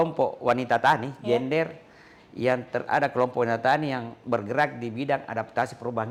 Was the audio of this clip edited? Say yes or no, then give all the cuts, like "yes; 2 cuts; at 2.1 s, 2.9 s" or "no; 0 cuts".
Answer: no; 0 cuts